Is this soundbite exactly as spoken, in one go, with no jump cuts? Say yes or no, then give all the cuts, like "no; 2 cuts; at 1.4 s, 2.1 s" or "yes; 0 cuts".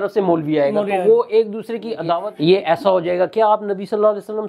no; 1 cut; at 2.1 s